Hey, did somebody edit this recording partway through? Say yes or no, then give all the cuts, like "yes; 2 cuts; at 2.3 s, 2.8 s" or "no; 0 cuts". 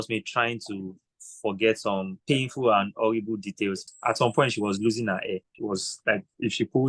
yes; 3 cuts; at 2.2 s, 3.8 s, 5.5 s